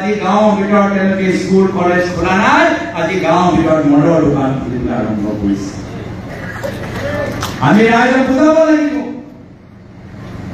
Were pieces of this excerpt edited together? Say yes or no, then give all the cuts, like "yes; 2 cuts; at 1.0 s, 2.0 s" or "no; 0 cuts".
no; 0 cuts